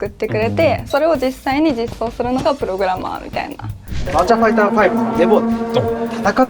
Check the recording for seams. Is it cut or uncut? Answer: cut